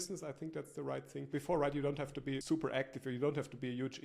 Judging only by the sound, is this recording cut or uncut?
cut